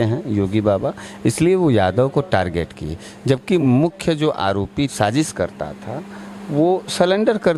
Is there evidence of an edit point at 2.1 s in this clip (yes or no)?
no